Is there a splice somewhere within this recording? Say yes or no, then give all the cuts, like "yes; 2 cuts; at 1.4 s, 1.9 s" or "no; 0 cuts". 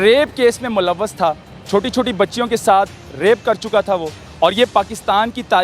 yes; 2 cuts; at 1.5 s, 4.2 s